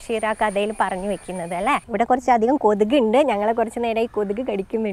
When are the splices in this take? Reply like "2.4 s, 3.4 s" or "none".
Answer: 1.9 s